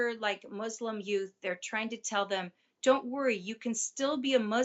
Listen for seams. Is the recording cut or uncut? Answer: uncut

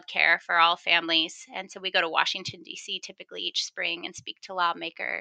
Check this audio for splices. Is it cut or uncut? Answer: uncut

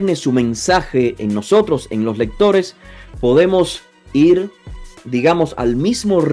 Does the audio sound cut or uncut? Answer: uncut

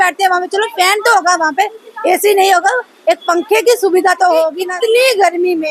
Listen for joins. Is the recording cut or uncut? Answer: cut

